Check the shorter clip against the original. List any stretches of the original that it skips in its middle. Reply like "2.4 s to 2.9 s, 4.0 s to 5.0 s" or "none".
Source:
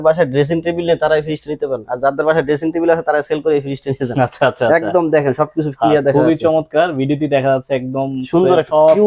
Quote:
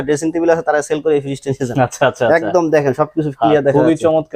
none